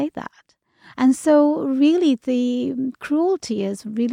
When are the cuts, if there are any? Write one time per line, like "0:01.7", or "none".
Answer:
none